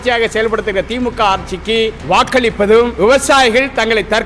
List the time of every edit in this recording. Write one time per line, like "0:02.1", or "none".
0:02.0
0:02.9